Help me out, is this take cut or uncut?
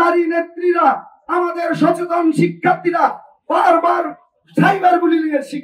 uncut